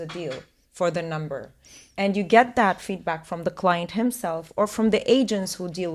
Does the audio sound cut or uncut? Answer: uncut